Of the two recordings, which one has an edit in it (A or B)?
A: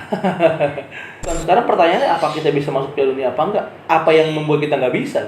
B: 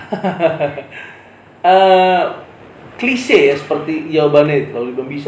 A